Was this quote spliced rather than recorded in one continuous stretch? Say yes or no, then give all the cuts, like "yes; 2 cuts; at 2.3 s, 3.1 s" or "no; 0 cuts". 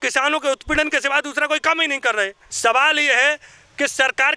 yes; 1 cut; at 2.4 s